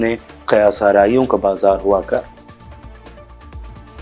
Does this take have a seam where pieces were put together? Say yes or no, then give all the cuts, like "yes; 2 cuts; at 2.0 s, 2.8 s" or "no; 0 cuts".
no; 0 cuts